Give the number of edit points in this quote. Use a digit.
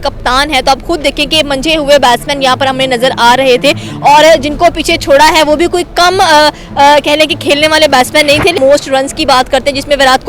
1